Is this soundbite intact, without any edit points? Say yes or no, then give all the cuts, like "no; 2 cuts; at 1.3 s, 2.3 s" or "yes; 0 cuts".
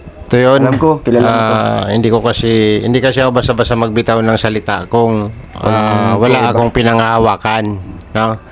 yes; 0 cuts